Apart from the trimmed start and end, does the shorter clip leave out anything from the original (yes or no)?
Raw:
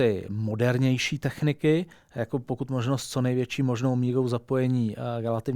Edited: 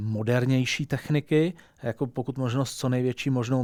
no